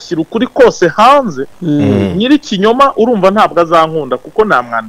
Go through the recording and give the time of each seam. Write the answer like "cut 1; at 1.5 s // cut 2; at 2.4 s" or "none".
none